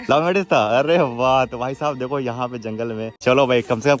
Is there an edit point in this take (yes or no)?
yes